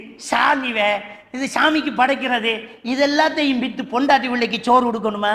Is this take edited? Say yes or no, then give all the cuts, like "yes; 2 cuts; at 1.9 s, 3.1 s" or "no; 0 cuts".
no; 0 cuts